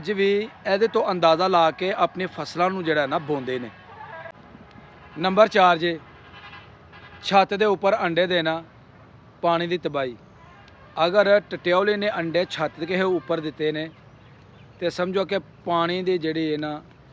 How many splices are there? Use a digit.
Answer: 1